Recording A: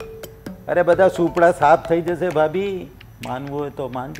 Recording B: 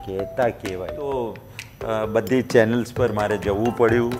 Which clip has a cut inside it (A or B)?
B